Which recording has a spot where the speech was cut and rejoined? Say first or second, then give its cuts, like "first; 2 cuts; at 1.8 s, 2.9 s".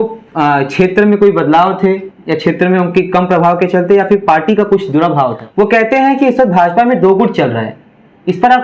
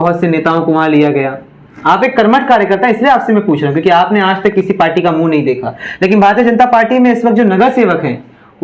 first; 1 cut; at 5.4 s